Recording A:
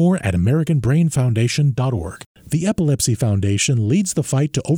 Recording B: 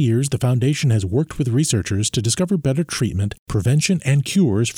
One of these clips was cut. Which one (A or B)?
A